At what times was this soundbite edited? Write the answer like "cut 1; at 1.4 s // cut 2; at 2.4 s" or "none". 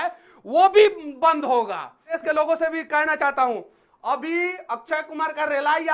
cut 1; at 2.2 s